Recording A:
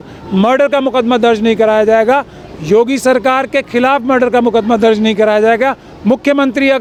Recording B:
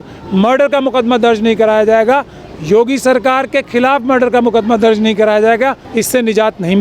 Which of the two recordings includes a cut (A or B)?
B